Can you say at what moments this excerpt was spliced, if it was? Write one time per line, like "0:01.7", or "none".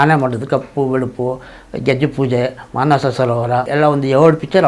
0:03.7

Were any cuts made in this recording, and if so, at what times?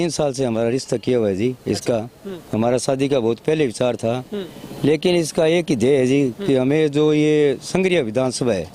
none

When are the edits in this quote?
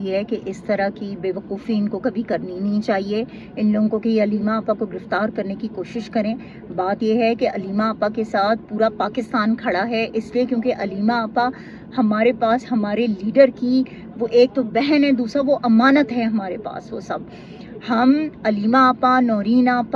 none

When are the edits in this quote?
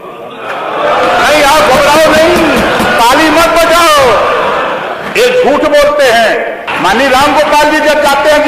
0:06.7

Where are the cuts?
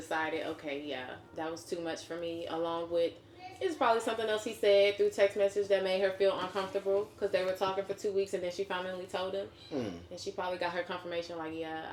none

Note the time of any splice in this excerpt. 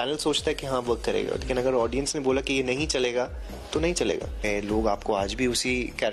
0:04.4

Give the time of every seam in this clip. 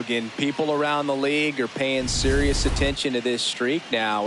none

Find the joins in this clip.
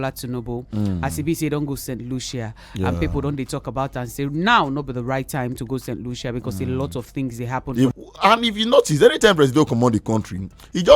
0:07.9

